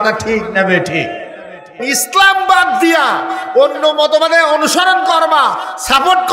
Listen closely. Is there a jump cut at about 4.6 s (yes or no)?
no